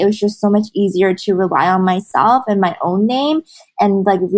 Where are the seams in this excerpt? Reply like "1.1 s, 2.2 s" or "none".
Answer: none